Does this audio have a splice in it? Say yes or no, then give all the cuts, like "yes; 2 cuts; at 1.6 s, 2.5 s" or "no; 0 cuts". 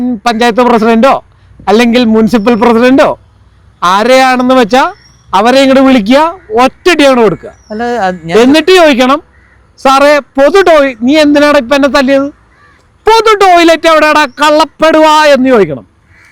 no; 0 cuts